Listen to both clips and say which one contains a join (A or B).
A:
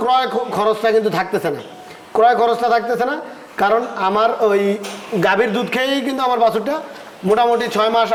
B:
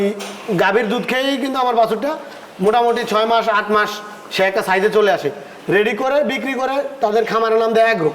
B